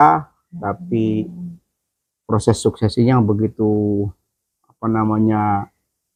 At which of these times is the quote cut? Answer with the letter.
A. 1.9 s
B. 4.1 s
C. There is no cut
C